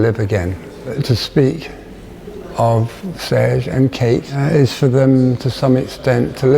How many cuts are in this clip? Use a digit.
2